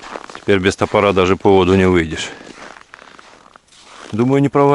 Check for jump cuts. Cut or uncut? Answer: cut